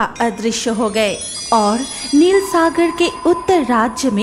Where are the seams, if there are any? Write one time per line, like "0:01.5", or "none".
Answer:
0:01.3